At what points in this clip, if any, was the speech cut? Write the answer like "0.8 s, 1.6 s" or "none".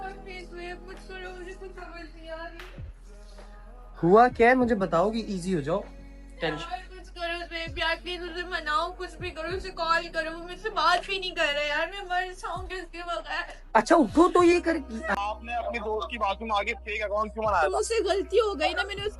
15.2 s